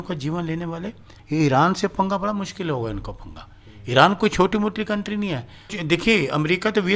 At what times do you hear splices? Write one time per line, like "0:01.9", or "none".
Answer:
0:01.1
0:05.7